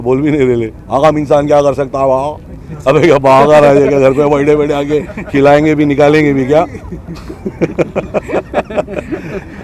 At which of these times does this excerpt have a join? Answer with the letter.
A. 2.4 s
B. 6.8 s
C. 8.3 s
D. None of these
D